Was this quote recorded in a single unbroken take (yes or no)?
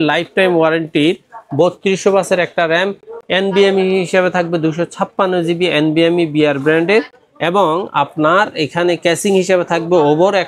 yes